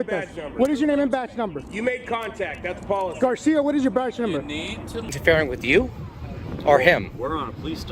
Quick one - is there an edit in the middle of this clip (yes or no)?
yes